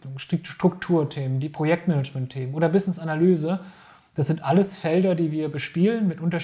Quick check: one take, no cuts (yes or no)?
yes